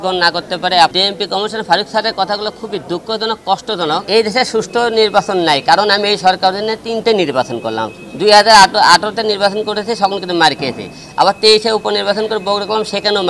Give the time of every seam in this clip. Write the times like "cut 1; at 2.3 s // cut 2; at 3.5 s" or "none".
cut 1; at 0.9 s // cut 2; at 4.0 s